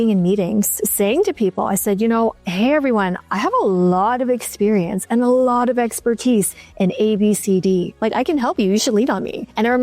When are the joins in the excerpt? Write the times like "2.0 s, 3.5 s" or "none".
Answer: 3.2 s, 7.9 s